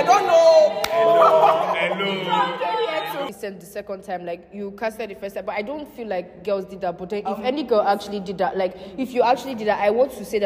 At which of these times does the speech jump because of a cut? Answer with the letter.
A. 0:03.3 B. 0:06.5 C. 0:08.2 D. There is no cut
A